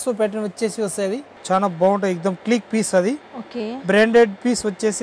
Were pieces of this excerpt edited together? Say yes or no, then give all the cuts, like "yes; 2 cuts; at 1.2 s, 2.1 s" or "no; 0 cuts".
yes; 1 cut; at 1.3 s